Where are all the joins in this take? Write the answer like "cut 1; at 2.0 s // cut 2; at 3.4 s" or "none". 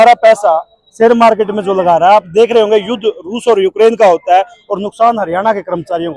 none

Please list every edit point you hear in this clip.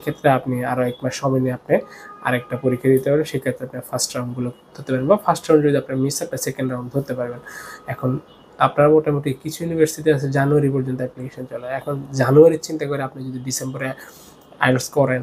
none

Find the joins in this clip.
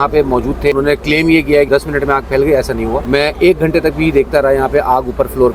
cut 1; at 0.7 s // cut 2; at 1.7 s // cut 3; at 3.0 s

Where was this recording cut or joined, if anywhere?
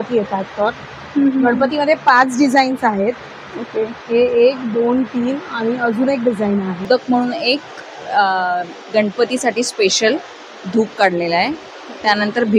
cut 1; at 6.9 s

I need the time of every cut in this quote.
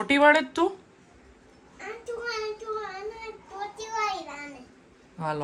none

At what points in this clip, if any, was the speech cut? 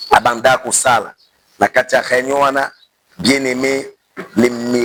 none

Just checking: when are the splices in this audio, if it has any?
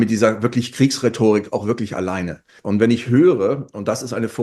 cut 1; at 2.5 s

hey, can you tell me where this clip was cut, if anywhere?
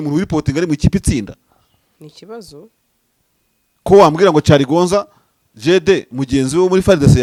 none

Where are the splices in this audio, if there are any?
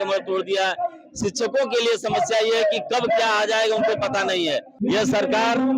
cut 1; at 4.7 s

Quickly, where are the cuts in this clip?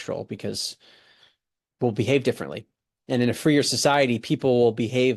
none

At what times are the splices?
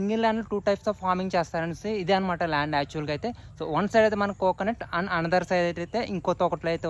none

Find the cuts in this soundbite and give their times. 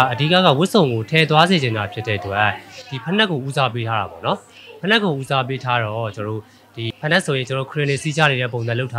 cut 1; at 6.9 s

